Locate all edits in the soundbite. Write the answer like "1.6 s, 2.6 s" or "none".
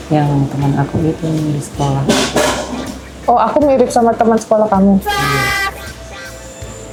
none